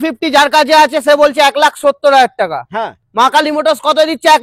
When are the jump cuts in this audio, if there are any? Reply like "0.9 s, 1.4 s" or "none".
none